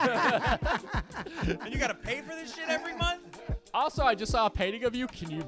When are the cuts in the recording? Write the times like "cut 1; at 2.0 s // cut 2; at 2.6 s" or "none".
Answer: none